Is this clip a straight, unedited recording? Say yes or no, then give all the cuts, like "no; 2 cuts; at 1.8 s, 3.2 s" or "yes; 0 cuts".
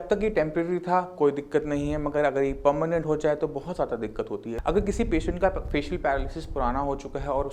no; 1 cut; at 4.6 s